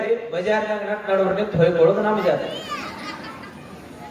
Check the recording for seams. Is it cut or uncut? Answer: uncut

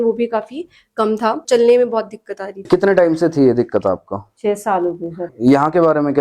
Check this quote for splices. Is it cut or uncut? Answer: cut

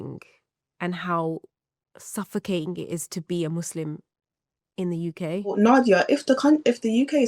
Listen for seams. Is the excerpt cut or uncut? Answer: cut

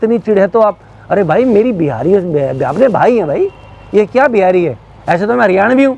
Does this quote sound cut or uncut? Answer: uncut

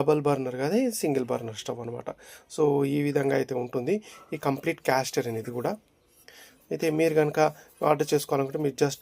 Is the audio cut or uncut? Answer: uncut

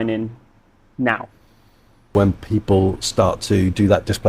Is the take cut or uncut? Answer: cut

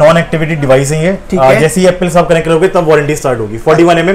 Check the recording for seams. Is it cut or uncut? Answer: uncut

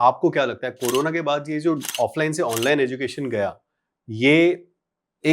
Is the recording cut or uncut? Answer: uncut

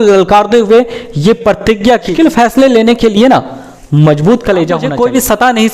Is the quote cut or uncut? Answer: cut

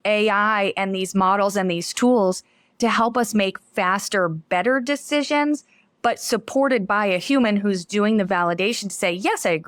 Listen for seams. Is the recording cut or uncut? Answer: uncut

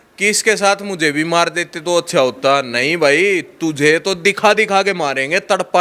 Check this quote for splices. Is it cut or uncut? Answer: uncut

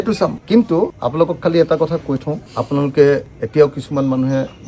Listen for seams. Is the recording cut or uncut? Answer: uncut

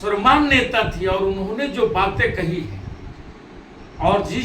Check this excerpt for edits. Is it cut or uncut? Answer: uncut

